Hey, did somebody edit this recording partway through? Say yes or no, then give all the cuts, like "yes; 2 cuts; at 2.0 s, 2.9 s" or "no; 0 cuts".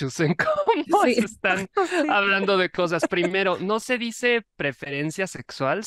no; 0 cuts